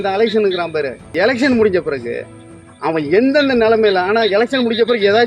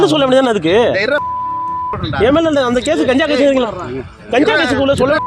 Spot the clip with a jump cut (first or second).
first